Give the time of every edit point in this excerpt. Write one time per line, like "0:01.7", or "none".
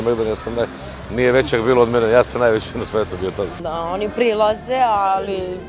0:03.6

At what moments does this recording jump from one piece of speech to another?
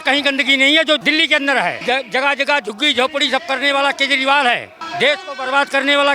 0:01.0
0:01.8
0:04.8

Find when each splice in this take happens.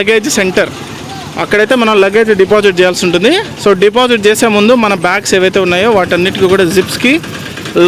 none

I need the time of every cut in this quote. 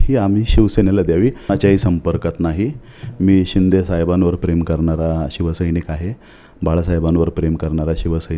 0:01.5

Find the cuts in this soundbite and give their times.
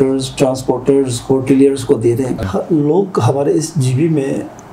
0:02.5

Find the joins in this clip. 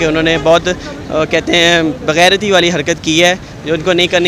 none

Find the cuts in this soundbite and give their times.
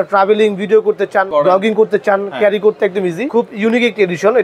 0:01.3
0:03.3

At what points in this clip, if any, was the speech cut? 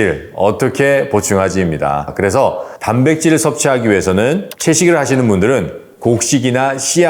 0:02.1

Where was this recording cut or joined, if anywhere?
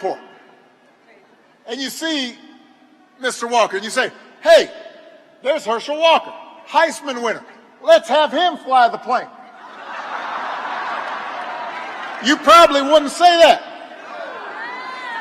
0:11.7

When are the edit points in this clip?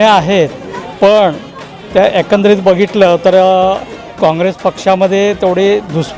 none

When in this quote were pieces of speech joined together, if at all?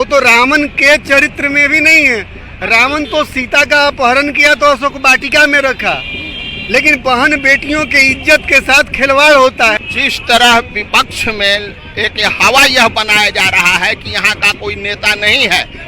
0:09.8

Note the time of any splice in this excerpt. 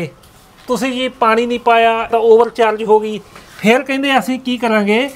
0:02.1

